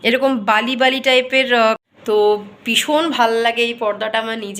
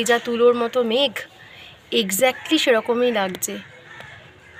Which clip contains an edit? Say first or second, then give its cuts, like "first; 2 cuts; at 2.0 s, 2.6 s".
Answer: first; 1 cut; at 1.8 s